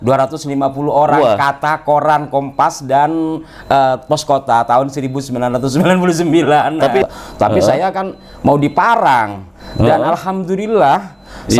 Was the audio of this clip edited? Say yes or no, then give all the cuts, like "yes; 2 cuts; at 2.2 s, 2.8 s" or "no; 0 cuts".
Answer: yes; 1 cut; at 7.0 s